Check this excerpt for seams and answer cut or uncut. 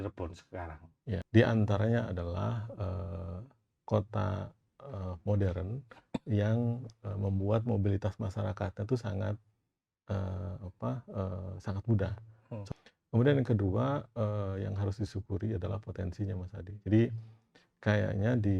cut